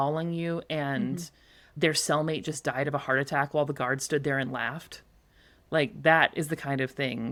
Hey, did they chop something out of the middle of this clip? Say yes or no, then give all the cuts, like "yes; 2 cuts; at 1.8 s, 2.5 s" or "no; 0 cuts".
no; 0 cuts